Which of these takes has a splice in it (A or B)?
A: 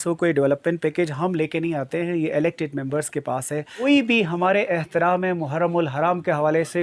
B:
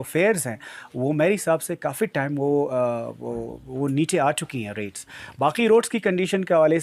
A